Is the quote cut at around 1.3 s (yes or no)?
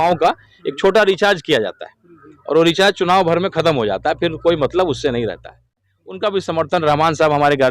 no